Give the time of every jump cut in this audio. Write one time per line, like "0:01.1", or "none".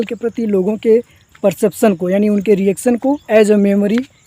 0:03.2